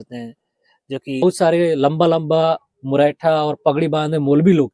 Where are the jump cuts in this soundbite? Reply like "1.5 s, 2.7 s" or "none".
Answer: 1.2 s